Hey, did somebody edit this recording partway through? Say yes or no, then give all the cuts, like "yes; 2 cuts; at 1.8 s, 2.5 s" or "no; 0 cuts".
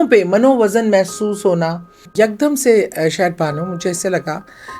yes; 1 cut; at 2.0 s